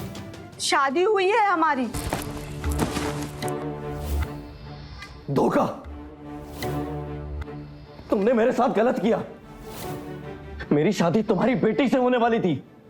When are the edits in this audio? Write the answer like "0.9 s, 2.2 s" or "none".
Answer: 2.0 s